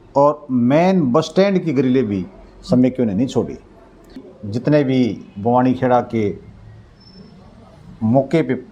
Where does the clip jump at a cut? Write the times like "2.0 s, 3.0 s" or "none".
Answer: 4.3 s